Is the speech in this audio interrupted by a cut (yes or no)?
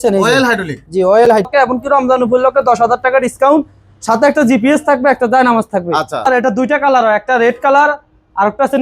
yes